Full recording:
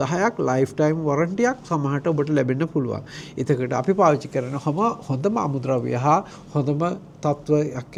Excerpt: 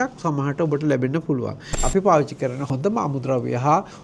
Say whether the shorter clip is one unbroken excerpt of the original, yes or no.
no